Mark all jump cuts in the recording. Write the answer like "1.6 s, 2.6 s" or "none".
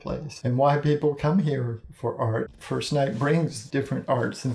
2.6 s, 3.6 s